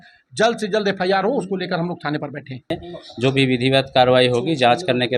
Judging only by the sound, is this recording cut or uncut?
cut